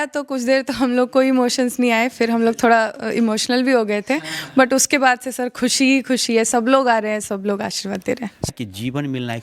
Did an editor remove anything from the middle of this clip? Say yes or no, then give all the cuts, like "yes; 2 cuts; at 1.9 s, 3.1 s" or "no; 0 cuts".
yes; 1 cut; at 8.5 s